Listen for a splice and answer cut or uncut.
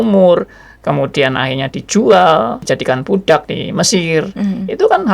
cut